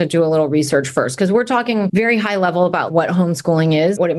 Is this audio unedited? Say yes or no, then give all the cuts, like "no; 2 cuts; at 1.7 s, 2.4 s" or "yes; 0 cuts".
no; 2 cuts; at 1.9 s, 2.9 s